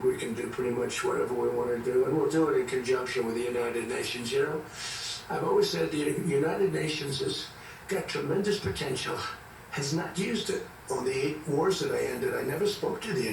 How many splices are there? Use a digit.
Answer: 1